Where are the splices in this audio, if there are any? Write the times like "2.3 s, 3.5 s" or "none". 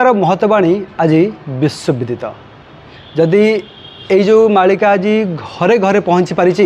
none